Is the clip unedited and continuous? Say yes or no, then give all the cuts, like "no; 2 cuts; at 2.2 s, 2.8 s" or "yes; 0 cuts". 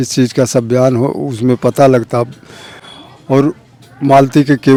yes; 0 cuts